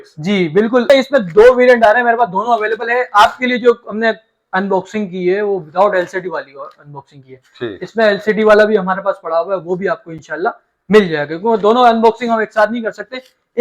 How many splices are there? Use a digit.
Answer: 1